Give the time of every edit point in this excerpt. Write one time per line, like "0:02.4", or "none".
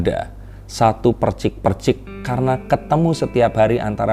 none